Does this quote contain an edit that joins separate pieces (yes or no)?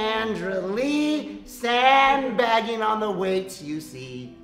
no